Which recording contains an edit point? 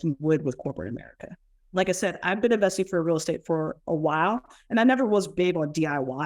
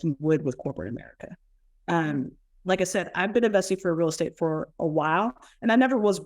first; 1 cut; at 1.5 s

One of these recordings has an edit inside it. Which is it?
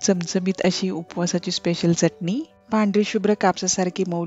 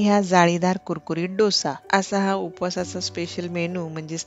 first; 1 cut; at 2.5 s

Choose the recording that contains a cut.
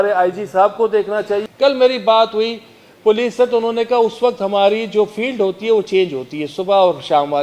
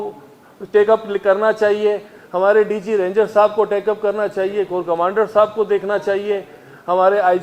first; 1 cut; at 1.4 s

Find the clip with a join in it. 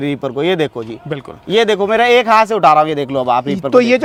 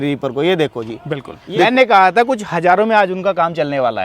second; 1 cut; at 1.3 s

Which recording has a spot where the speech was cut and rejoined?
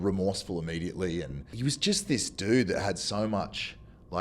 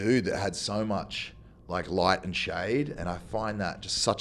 first; 1 cut; at 1.4 s

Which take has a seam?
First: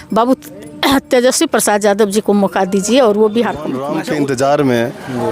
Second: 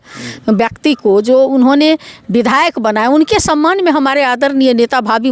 first; 1 cut; at 3.8 s

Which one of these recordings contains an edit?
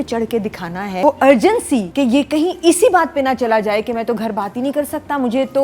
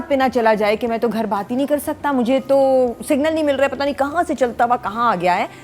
first; 2 cuts; at 1.0 s, 1.9 s

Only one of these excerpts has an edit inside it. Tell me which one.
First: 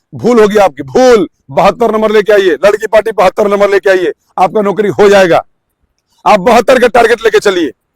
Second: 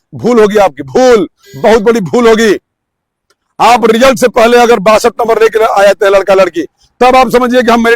first; 1 cut; at 1.4 s

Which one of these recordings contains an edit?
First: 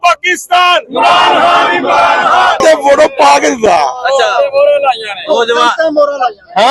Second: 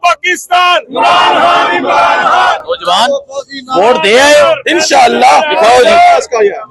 first; 1 cut; at 2.6 s

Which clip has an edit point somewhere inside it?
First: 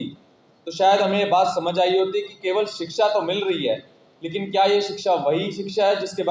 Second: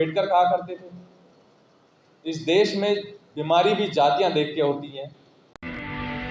second; 1 cut; at 5.4 s

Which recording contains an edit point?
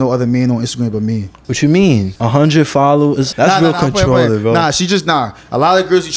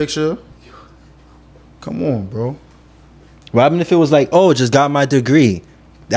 first; 3 cuts; at 1.4 s, 2.1 s, 3.3 s

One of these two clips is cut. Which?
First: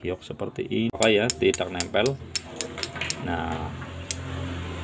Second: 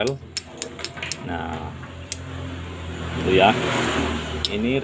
first; 1 cut; at 1.0 s

